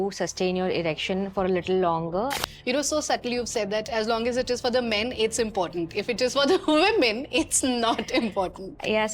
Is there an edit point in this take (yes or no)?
yes